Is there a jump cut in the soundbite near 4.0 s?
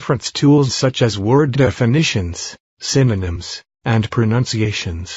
yes; 1 cut; at 4.0 s

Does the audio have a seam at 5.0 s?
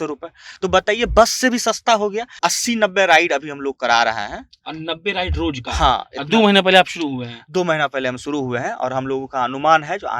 no; 1 cut; at 2.3 s

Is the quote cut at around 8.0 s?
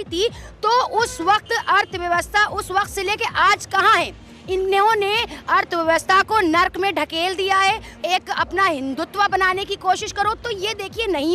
yes; 1 cut; at 8.0 s

